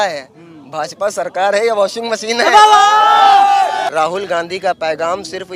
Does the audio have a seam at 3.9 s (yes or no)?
yes